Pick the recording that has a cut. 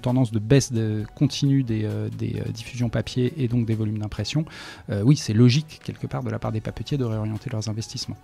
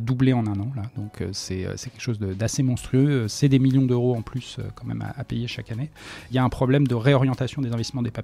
second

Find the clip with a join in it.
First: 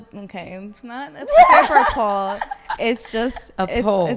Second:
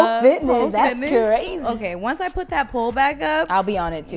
second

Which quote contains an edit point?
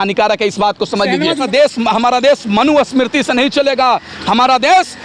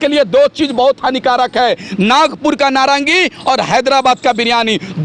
first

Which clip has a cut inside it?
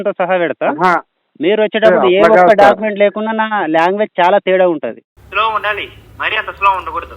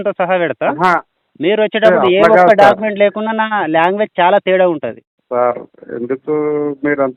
first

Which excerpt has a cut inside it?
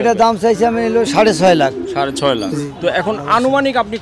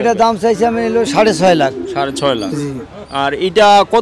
first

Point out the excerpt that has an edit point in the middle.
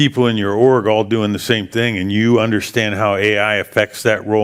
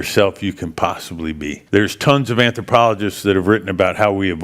second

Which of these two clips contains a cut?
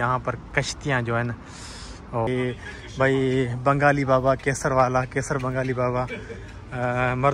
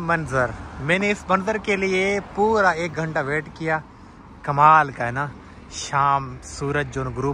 first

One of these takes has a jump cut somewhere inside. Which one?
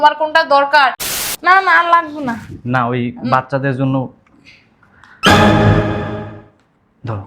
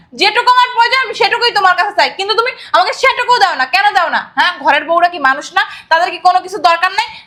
first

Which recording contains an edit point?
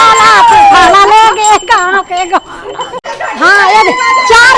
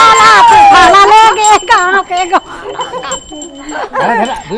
first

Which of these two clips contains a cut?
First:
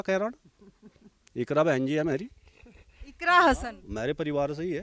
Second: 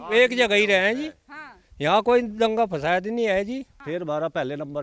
second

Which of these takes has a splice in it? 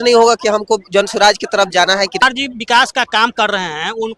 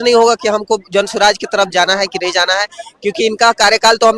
first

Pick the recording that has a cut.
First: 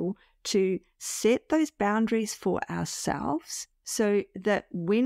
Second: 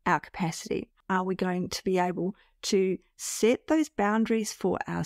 second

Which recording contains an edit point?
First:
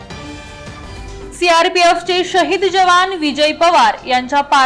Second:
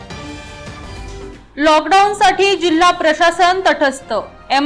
first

